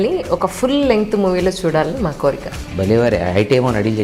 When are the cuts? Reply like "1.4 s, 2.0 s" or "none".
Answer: 2.6 s